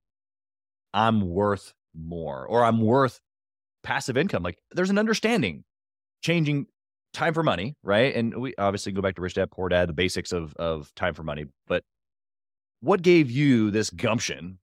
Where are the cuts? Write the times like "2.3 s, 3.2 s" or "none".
4.7 s